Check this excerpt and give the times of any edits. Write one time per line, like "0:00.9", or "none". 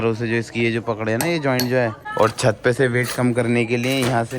0:02.0

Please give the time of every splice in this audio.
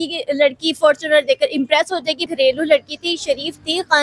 0:02.3

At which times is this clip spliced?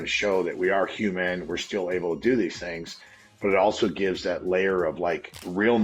none

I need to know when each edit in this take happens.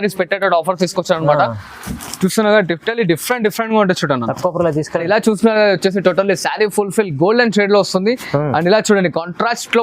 0:05.0

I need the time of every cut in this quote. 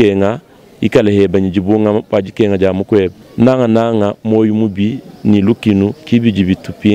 0:03.2

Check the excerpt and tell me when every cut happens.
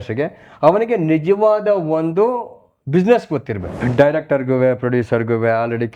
0:03.8

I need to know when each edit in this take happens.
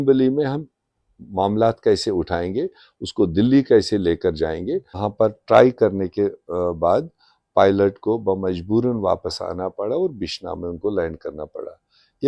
0:05.0

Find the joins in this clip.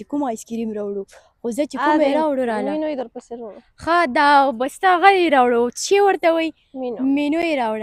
none

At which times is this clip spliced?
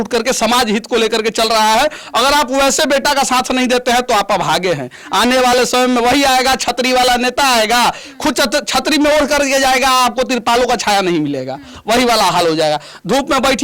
none

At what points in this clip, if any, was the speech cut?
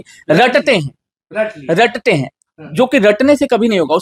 none

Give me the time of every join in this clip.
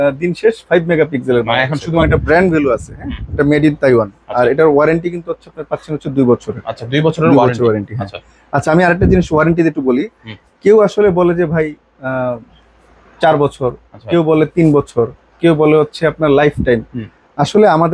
0:02.1

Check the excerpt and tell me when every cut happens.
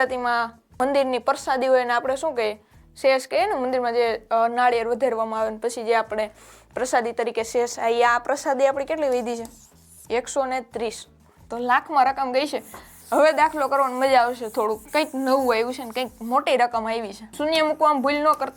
0:11.2
0:17.2

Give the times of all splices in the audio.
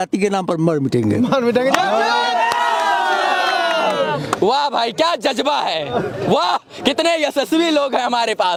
none

